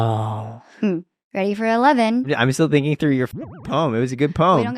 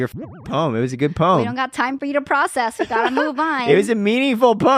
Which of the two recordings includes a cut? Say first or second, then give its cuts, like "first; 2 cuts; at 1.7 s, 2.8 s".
first; 2 cuts; at 1.2 s, 2.3 s